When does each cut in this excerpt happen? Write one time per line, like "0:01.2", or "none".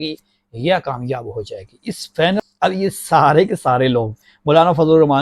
0:02.4